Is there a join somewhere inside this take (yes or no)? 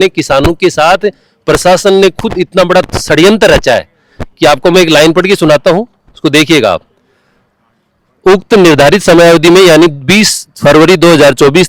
no